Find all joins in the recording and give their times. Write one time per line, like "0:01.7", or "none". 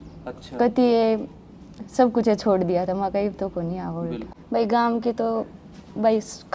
0:04.3